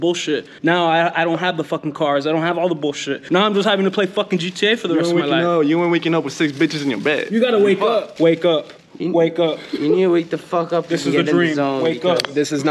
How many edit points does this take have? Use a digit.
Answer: 0